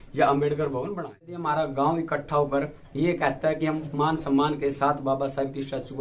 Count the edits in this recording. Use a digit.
1